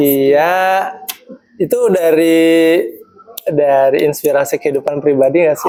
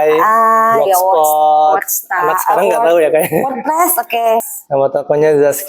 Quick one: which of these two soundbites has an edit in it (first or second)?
second